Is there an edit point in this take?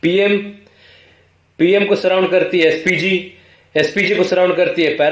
no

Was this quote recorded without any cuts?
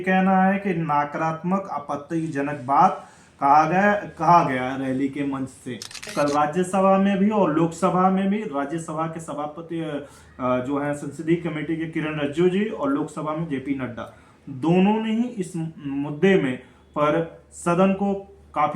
no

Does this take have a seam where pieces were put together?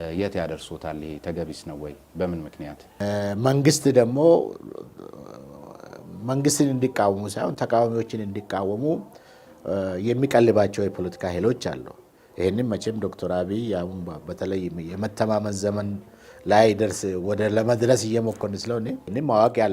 yes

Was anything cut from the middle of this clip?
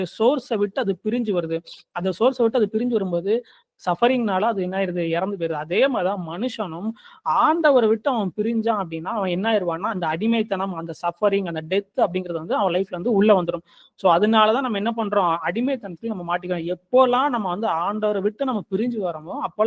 no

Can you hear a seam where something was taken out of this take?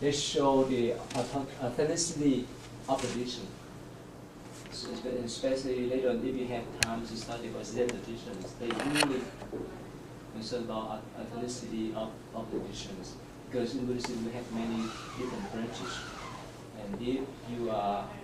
yes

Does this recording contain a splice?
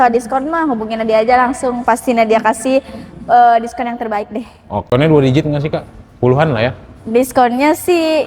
yes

